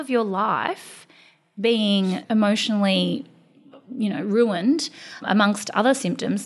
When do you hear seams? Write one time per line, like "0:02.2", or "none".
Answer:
0:02.2
0:05.2